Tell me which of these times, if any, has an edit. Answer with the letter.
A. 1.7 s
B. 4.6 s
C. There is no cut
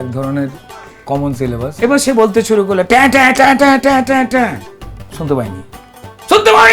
A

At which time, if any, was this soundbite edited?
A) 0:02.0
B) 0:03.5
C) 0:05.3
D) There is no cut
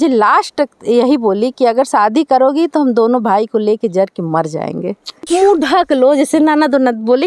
C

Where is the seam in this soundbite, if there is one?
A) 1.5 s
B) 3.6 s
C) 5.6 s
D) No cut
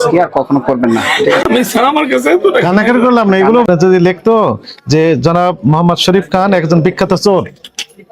B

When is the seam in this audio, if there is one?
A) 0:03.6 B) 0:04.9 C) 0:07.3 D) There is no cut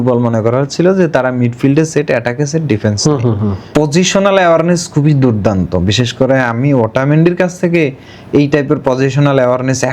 A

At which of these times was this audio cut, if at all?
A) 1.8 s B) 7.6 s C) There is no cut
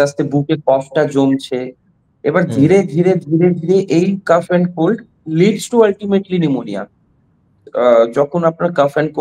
B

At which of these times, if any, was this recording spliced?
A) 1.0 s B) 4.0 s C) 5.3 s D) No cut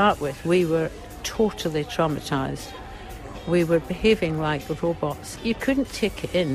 C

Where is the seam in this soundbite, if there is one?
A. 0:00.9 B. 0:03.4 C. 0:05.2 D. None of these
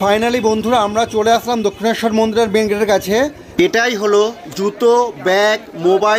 B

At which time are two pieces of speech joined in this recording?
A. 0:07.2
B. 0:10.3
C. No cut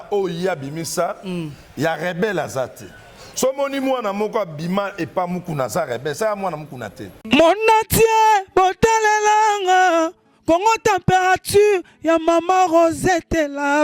A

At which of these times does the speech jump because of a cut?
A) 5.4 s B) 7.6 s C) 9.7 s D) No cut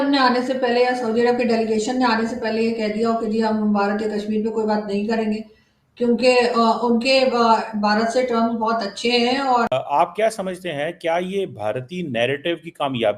C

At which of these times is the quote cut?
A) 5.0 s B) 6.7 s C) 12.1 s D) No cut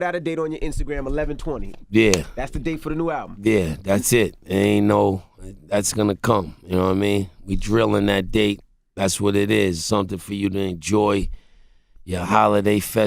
D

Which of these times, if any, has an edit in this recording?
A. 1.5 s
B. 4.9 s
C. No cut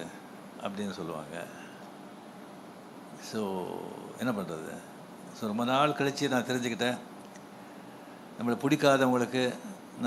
C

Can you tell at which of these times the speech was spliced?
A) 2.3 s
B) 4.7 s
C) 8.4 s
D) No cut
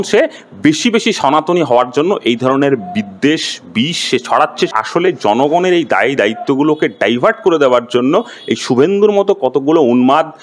B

